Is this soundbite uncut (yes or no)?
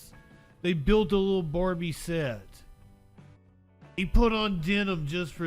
no